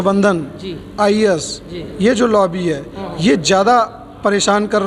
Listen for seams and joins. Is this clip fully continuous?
yes; 0 cuts

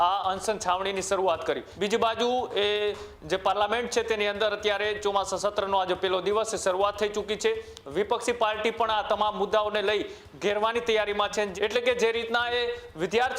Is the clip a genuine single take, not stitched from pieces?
no; 2 cuts; at 1.7 s, 11.5 s

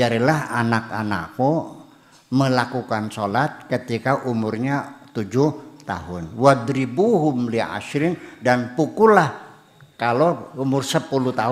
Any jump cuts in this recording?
no; 0 cuts

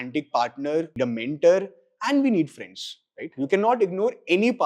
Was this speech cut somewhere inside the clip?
yes; 1 cut; at 0.9 s

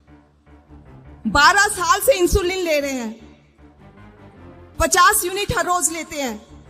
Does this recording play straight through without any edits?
no; 3 cuts; at 1.2 s, 3.3 s, 4.8 s

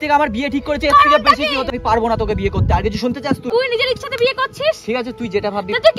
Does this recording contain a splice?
yes; 2 cuts; at 1.7 s, 3.5 s

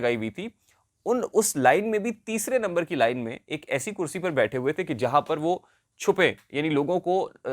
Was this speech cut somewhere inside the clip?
no; 0 cuts

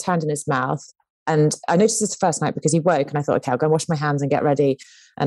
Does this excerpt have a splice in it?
no; 0 cuts

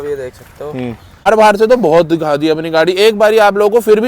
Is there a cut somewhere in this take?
yes; 1 cut; at 1.3 s

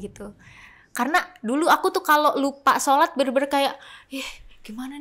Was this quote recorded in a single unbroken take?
yes; 0 cuts

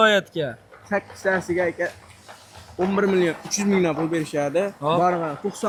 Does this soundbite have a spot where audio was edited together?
no; 0 cuts

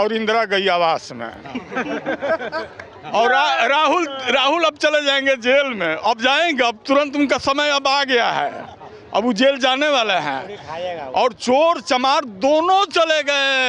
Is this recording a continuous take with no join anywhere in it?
yes; 0 cuts

